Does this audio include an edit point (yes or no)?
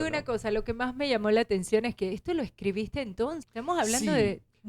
yes